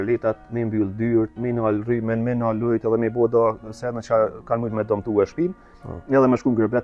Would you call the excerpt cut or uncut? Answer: uncut